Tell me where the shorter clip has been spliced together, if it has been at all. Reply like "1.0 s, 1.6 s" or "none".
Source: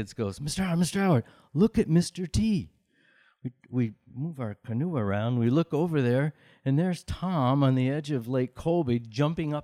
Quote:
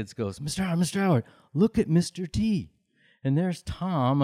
3.0 s

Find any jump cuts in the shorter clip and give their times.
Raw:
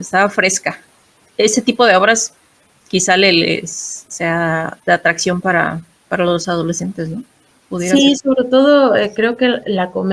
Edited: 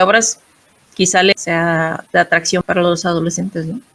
1.3 s, 2.6 s

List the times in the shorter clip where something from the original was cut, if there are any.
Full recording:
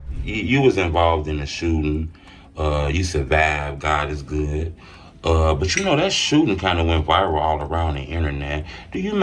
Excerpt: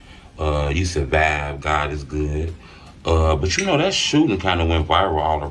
none

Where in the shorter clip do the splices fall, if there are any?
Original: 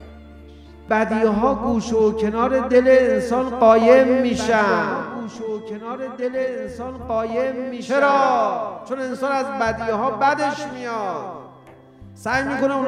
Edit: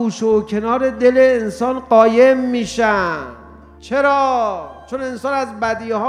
3.7 s

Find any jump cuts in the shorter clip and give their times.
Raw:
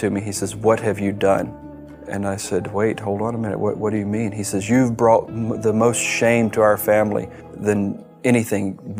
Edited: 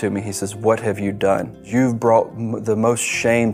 1.6 s

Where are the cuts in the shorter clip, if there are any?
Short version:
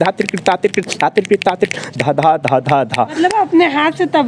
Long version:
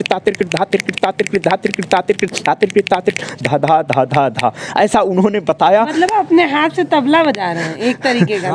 3.1 s

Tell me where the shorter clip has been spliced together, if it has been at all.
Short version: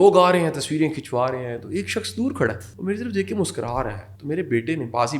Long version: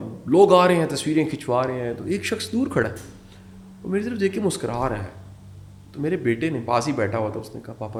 2.7 s, 4.1 s

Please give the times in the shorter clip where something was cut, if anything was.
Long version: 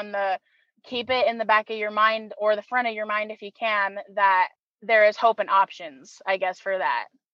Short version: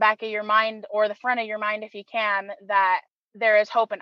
none

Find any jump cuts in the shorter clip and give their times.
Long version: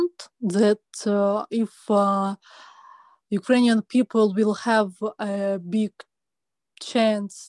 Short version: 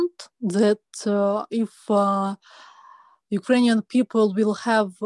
none

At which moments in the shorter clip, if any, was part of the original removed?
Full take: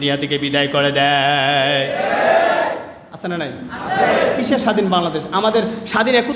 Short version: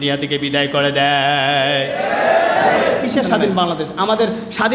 2.6 s

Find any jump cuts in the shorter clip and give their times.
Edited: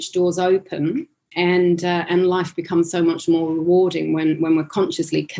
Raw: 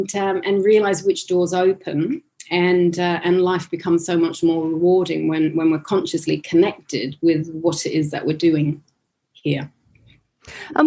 none

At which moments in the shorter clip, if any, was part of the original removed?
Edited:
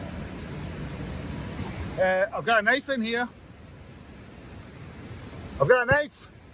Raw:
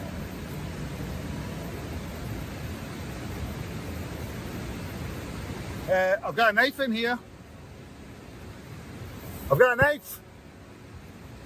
1.5 s

